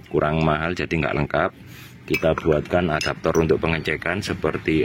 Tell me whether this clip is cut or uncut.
uncut